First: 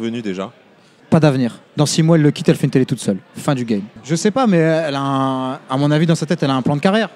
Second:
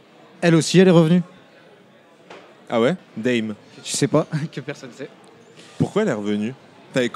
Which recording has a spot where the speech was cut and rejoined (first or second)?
first